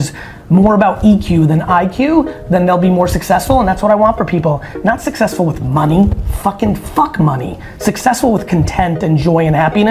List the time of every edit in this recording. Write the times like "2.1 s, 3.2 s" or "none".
none